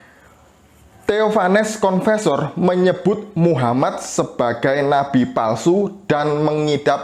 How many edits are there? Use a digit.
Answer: 1